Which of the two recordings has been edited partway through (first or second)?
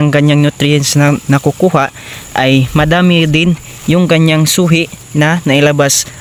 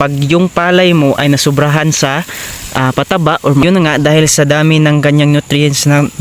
second